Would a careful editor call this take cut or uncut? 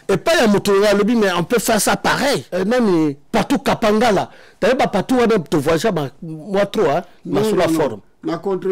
cut